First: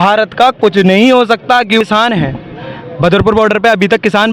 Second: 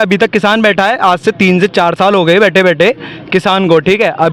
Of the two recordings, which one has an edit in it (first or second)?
first